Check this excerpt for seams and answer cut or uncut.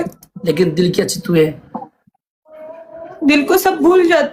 uncut